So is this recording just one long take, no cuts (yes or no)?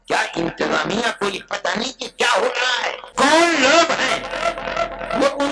no